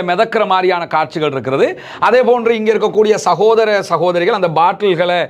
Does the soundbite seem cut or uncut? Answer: uncut